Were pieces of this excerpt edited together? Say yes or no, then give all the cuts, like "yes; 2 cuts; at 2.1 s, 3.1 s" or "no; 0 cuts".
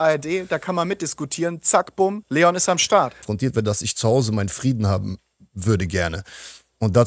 yes; 2 cuts; at 2.2 s, 3.2 s